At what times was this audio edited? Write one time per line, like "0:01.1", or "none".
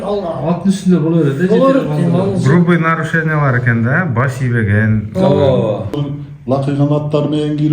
0:06.0